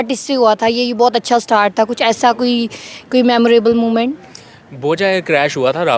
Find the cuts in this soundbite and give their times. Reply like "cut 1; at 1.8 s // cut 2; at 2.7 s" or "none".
none